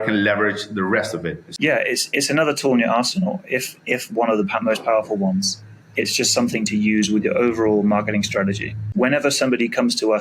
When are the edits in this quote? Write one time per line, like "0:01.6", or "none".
0:01.5
0:08.8